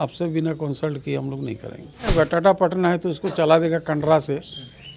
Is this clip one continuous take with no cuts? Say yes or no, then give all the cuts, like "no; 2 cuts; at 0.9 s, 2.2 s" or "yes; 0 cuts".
no; 1 cut; at 2.1 s